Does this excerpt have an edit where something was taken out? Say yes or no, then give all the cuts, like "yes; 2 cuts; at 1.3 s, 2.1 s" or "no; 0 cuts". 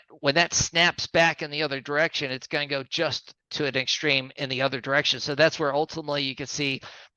no; 0 cuts